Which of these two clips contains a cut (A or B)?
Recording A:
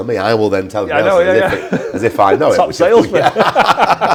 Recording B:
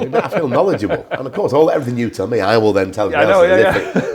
B